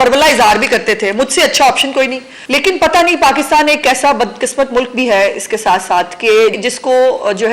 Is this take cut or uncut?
cut